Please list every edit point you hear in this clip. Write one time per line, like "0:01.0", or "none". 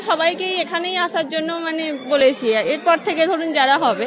none